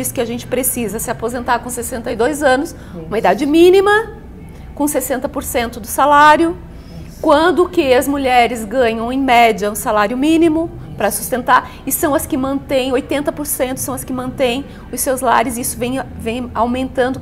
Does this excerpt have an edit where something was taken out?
no; 0 cuts

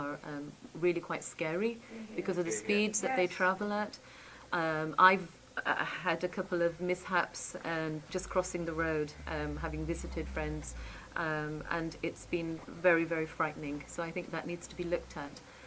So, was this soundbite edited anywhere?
no; 0 cuts

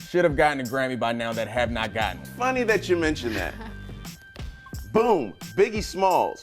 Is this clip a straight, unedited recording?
no; 1 cut; at 2.2 s

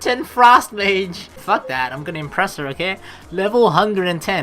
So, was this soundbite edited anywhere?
yes; 1 cut; at 1.3 s

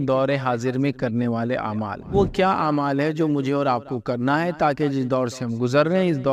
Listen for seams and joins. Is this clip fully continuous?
no; 1 cut; at 2.1 s

